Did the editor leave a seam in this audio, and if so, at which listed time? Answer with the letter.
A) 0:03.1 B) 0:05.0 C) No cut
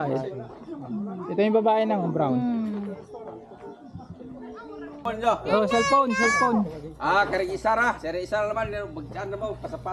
B